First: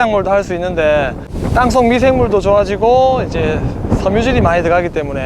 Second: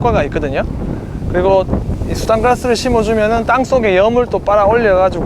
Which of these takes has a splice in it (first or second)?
first